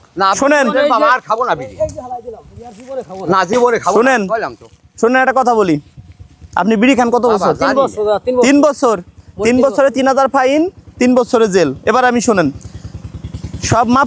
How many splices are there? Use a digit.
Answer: 0